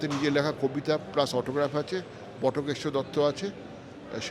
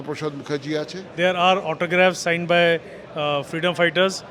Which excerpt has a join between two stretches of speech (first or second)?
second